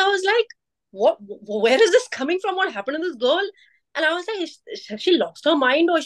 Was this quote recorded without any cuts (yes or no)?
yes